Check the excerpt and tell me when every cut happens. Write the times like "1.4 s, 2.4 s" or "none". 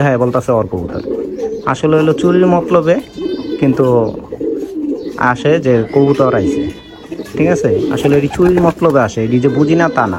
none